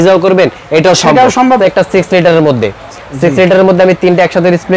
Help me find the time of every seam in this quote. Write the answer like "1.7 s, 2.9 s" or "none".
1.6 s